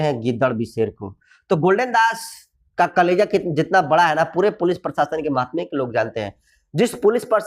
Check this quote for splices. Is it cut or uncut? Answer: uncut